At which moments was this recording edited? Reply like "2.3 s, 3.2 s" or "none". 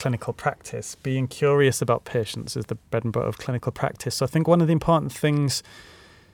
none